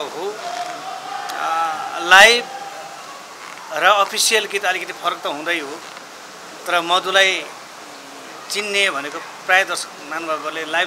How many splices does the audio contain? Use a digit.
0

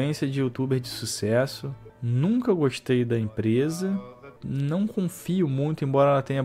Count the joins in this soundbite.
1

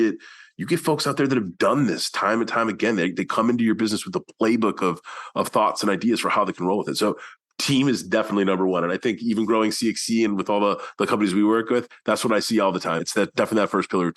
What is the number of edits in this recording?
1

